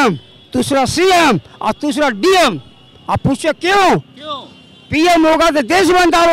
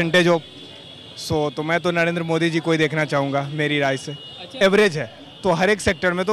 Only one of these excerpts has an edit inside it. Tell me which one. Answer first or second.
second